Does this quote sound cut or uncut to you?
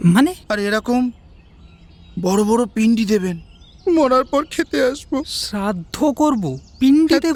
uncut